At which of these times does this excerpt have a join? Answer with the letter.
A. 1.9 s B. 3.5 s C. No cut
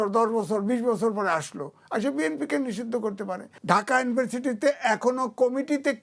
B